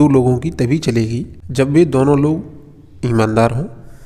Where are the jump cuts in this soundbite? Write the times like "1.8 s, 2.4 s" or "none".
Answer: 1.3 s